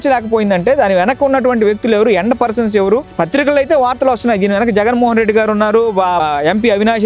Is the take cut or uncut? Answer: uncut